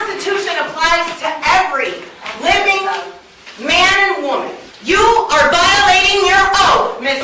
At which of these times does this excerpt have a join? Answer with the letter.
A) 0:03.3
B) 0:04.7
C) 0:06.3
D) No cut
B